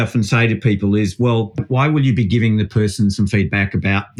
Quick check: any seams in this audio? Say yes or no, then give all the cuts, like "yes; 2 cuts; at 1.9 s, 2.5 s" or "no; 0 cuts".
yes; 1 cut; at 1.7 s